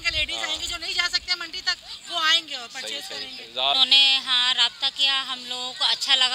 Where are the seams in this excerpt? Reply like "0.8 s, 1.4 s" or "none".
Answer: 3.7 s